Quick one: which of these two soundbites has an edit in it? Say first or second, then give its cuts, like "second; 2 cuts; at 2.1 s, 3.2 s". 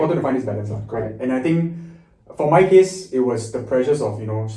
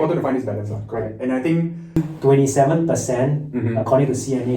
second; 1 cut; at 2.0 s